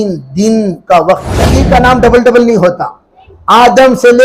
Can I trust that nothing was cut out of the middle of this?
no; 1 cut; at 1.6 s

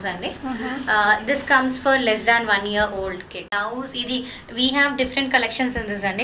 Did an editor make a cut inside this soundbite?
yes; 1 cut; at 3.5 s

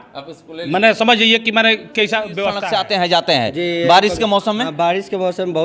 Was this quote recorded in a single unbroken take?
no; 1 cut; at 2.5 s

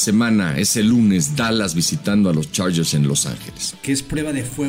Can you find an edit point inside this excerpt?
yes; 1 cut; at 3.7 s

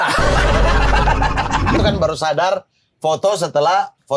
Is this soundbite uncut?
no; 1 cut; at 1.8 s

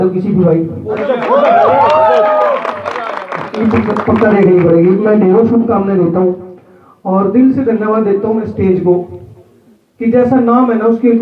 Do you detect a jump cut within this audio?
no; 0 cuts

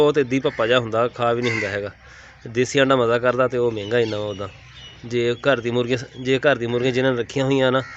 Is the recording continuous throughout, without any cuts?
yes; 0 cuts

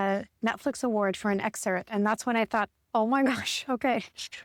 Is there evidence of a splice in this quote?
no; 0 cuts

